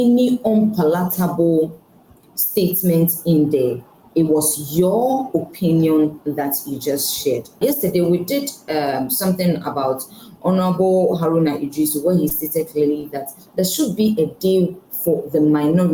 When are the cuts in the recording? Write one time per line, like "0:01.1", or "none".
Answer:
0:07.6